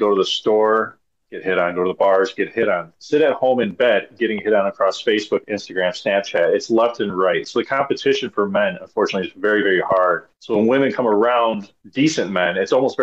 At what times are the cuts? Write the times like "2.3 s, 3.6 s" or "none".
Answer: 10.3 s, 11.8 s